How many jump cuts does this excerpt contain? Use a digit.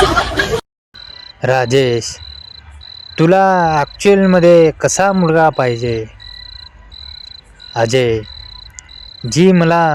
0